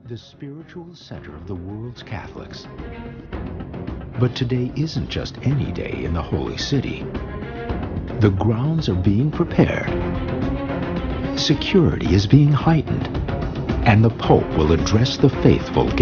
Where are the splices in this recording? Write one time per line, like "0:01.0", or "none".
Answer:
0:02.7

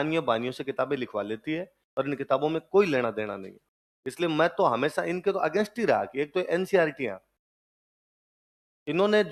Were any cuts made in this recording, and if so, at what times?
none

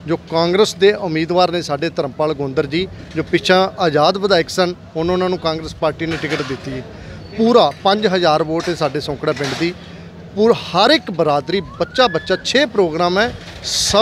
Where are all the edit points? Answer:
none

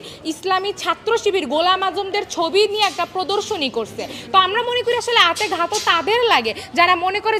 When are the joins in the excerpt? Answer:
none

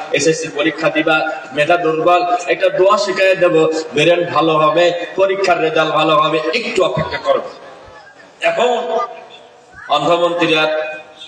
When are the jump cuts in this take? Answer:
none

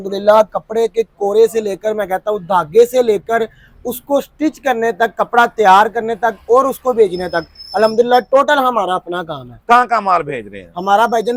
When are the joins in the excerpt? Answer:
none

